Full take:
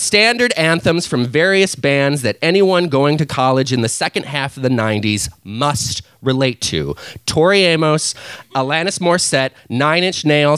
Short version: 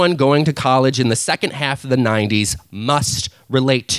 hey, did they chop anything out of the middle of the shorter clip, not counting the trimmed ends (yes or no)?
no